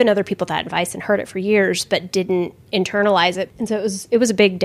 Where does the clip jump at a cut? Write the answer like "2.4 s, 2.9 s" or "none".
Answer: 3.5 s